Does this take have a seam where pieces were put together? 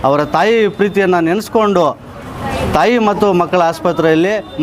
no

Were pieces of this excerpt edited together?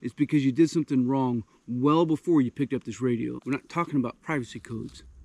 yes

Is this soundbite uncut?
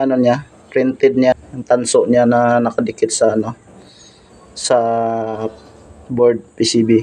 no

